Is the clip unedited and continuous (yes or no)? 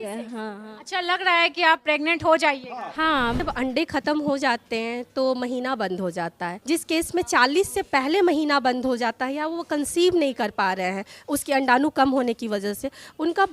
no